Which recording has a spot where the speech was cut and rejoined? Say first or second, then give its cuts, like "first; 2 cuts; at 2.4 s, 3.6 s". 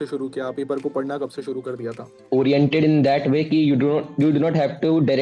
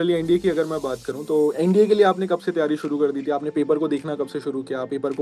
first; 1 cut; at 2.1 s